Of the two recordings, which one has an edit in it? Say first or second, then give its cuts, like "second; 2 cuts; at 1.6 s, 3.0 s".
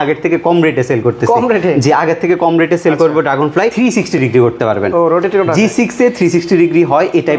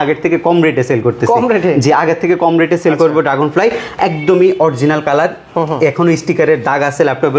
first; 1 cut; at 3.7 s